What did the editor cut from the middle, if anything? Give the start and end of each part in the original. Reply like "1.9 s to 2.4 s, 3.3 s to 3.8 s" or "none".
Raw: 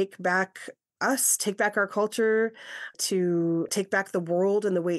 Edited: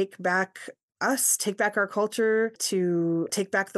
2.6 s to 3.0 s